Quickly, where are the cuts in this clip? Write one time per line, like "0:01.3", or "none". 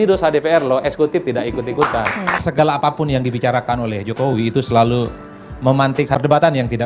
0:02.3
0:05.6